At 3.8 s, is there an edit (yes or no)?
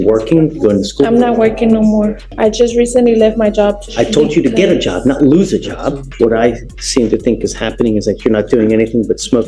yes